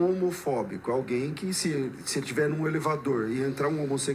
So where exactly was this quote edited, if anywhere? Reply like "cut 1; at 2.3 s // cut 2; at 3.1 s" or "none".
none